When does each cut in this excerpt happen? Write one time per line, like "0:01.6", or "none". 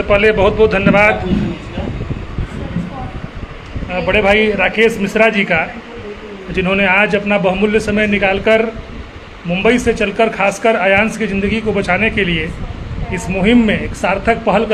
none